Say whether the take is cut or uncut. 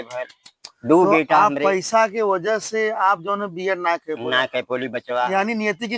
uncut